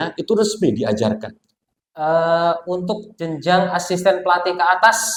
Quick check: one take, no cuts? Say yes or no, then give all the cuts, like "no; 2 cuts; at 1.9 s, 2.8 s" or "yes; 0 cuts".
yes; 0 cuts